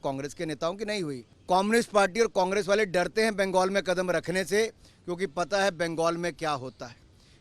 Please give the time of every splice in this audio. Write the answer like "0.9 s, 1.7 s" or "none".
1.3 s